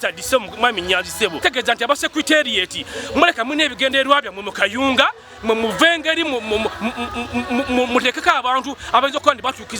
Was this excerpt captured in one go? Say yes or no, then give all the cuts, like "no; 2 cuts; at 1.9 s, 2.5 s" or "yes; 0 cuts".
no; 1 cut; at 1.4 s